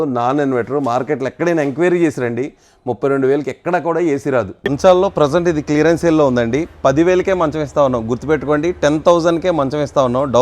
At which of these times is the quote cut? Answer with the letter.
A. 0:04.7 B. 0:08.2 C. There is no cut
A